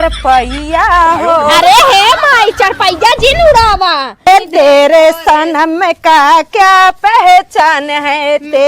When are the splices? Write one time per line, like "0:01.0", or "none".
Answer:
0:04.3